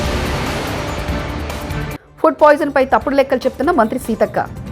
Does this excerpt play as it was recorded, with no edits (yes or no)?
no